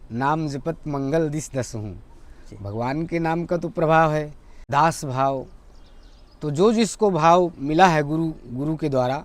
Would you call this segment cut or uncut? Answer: cut